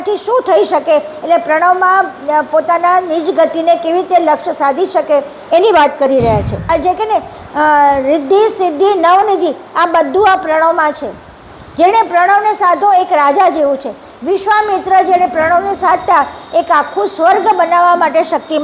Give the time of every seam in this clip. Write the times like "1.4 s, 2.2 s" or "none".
6.6 s